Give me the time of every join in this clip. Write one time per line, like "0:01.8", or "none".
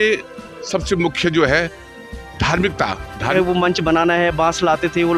0:03.3